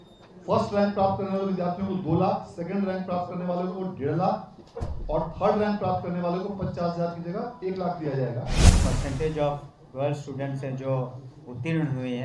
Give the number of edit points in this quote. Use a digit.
1